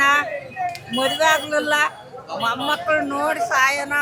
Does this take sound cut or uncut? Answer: uncut